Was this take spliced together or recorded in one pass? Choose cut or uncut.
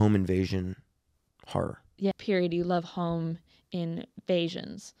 cut